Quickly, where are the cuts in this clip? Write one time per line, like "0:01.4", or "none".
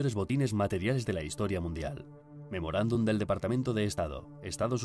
0:01.0